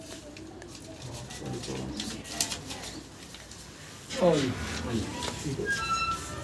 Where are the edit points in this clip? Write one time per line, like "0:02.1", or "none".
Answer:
none